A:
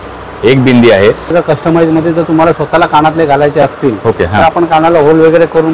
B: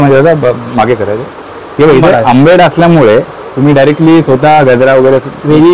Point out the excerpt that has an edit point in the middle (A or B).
A